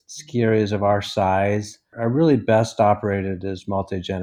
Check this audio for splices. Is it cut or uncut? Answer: cut